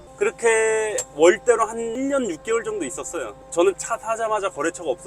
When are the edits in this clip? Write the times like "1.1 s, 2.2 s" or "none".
1.0 s, 1.9 s, 3.4 s

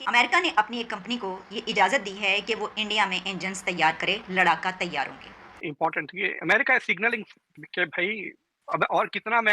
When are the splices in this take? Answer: 5.7 s

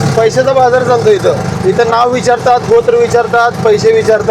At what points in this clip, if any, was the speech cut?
none

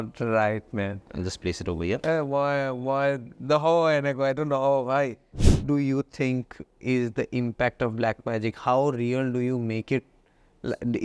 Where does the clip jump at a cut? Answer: 5.6 s

